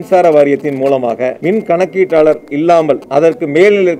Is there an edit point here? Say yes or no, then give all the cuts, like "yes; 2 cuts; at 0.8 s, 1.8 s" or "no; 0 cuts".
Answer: yes; 2 cuts; at 1.4 s, 3.0 s